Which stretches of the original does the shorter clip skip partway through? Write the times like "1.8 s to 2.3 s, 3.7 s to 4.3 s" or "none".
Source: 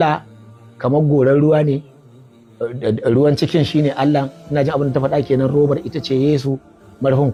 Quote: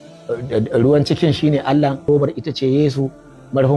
4.4 s to 5.5 s